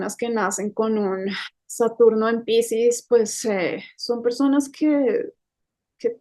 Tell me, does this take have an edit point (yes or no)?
no